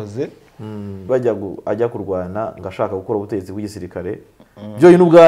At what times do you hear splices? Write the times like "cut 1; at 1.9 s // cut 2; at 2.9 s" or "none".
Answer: cut 1; at 1.1 s

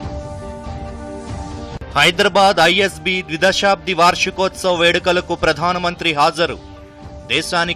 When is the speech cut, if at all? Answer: none

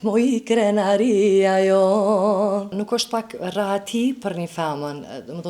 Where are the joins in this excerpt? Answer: cut 1; at 2.8 s

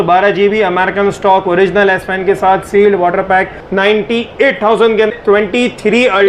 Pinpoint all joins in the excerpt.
cut 1; at 3.6 s // cut 2; at 5.1 s

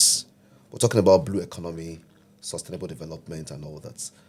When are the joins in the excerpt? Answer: none

